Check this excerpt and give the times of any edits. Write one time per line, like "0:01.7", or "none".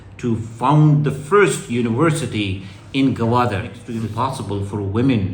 0:03.8